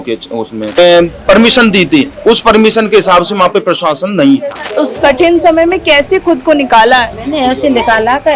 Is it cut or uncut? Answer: cut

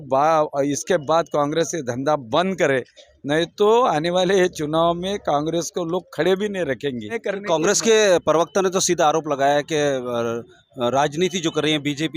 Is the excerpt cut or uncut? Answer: cut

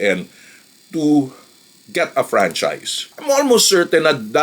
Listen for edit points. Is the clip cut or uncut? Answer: cut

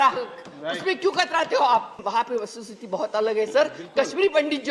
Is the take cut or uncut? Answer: cut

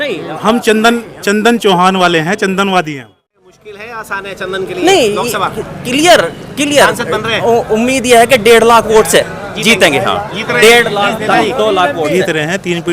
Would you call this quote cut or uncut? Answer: cut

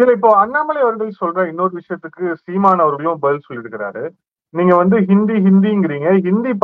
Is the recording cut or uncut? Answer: uncut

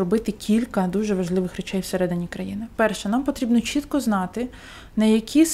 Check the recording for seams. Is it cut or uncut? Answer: uncut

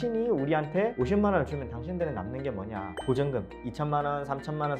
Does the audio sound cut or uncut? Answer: cut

